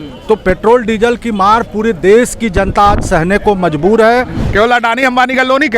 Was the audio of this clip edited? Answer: yes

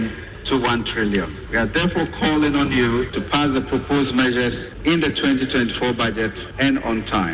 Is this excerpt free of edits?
no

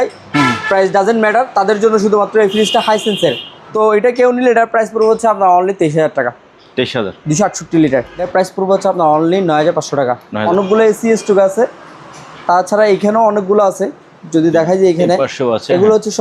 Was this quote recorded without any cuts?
no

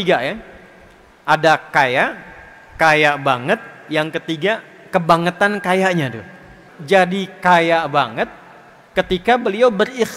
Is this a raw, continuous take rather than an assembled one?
no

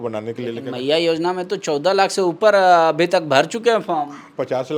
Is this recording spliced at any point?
no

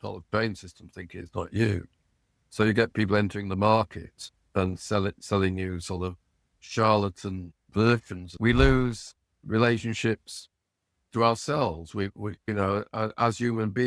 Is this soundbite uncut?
no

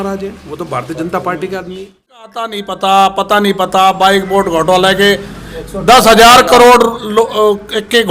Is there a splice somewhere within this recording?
yes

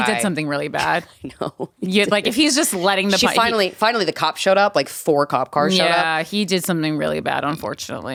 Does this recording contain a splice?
no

